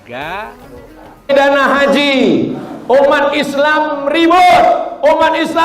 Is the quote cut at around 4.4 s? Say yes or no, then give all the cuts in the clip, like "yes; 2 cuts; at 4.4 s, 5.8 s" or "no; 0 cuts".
no; 1 cut; at 1.3 s